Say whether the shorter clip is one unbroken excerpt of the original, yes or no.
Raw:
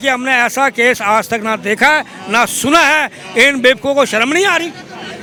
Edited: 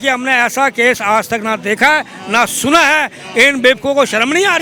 yes